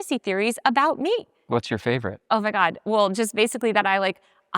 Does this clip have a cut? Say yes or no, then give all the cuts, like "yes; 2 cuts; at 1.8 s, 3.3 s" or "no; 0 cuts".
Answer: yes; 1 cut; at 1.4 s